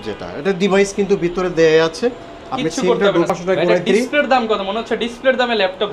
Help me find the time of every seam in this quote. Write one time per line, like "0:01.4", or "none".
0:03.3